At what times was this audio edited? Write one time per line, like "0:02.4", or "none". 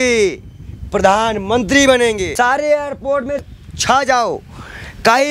0:02.3
0:03.5